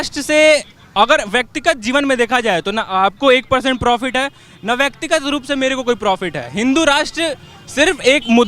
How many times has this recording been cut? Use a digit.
0